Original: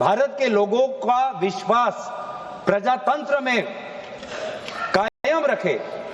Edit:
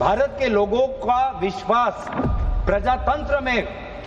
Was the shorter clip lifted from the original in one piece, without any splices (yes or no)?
yes